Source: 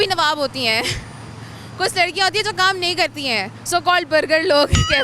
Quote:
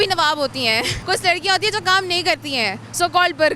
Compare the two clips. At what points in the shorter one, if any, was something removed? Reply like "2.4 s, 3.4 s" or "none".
1.0 s

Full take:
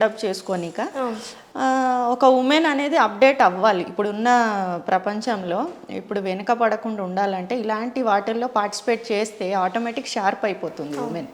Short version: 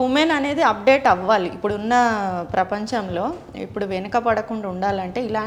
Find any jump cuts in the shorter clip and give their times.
none

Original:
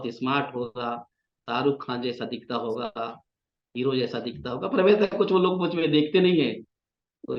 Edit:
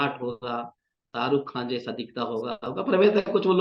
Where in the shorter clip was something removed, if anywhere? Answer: 2.6 s

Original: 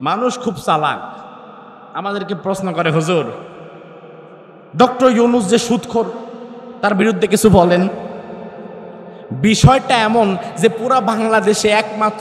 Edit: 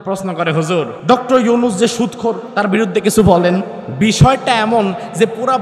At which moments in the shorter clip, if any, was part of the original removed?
1.0 s, 2.5 s, 3.8 s

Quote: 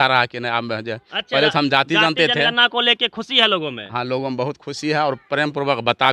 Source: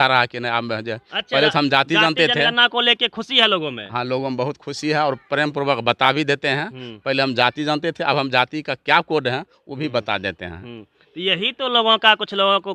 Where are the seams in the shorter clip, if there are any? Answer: none

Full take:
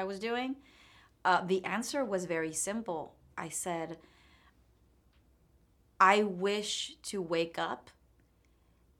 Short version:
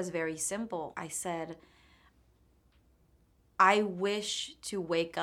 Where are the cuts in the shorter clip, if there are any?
0.9 s

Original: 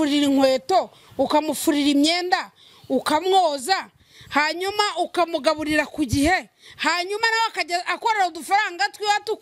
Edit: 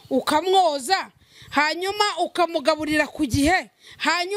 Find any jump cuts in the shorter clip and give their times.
none

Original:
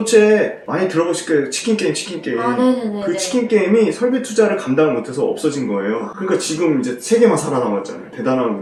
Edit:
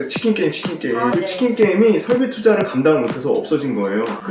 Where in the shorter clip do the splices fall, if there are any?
1.1 s

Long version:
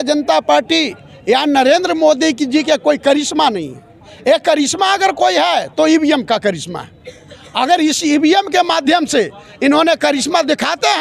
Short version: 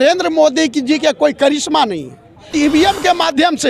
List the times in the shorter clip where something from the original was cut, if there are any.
2.5 s

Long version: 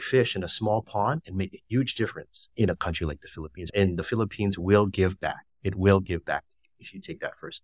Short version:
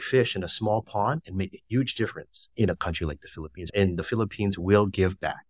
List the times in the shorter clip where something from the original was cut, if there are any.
none

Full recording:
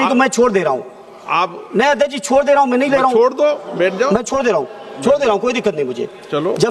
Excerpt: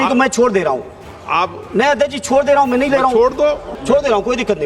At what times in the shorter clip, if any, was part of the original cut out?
3.7 s

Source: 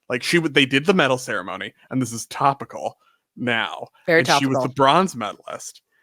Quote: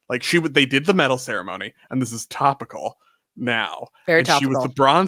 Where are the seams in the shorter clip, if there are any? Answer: none

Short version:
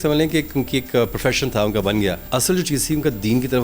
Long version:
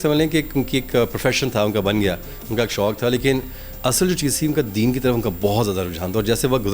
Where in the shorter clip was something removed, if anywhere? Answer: 2.2 s

